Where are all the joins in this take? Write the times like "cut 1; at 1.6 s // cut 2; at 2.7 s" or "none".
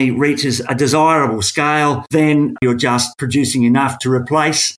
cut 1; at 2.6 s